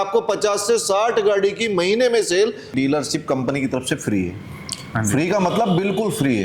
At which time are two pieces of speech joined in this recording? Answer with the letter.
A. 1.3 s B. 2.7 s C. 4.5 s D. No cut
B